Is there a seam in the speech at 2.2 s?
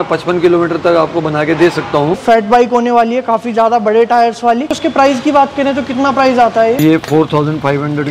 yes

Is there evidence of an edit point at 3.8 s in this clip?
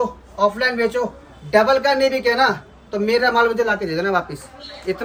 no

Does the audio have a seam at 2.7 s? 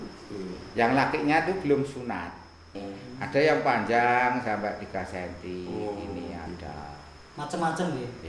yes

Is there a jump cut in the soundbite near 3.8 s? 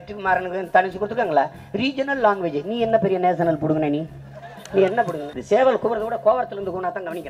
no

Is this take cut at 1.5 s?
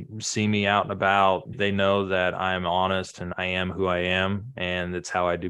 yes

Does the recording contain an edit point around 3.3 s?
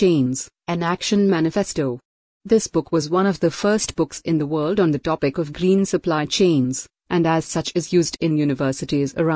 no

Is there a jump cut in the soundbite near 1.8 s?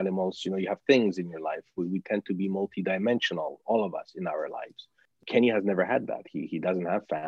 no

